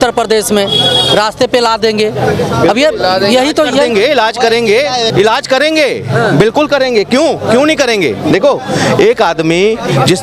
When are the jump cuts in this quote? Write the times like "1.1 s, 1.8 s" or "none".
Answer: 5.1 s